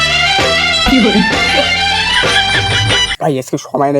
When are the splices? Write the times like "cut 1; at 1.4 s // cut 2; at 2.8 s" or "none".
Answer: cut 1; at 3.1 s